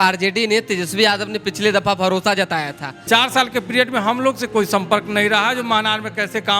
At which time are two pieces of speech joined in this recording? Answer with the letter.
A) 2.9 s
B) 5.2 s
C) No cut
A